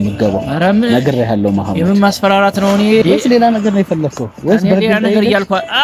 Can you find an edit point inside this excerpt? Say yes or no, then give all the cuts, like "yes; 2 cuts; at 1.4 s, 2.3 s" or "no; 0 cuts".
yes; 1 cut; at 3.0 s